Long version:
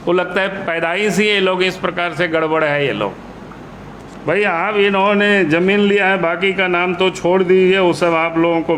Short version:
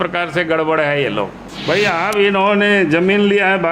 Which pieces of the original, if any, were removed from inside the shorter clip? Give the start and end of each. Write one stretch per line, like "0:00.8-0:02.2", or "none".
0:03.3-0:04.0